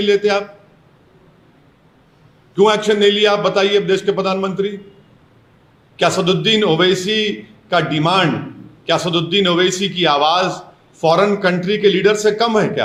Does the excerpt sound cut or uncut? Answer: uncut